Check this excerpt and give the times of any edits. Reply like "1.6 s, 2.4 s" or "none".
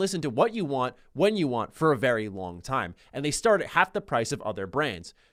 none